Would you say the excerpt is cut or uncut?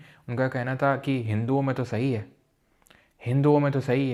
uncut